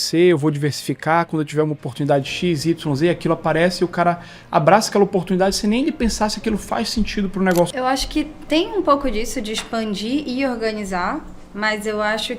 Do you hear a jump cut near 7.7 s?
yes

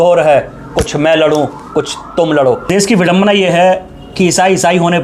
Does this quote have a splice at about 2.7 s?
yes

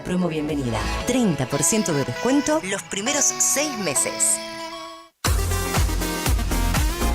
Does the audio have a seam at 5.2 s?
yes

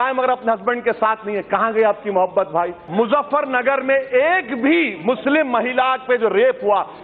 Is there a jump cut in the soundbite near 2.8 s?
yes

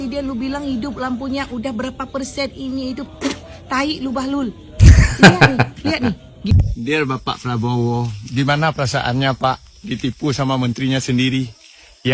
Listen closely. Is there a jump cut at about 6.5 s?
yes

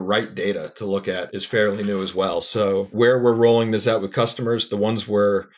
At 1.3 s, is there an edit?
yes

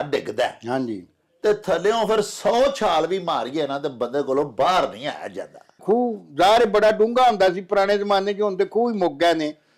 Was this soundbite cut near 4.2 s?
no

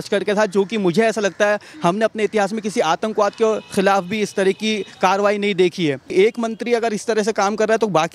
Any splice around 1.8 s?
no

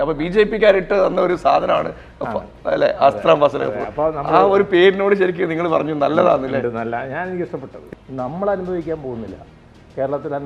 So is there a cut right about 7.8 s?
yes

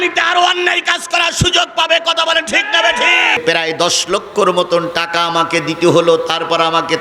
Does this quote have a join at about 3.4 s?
yes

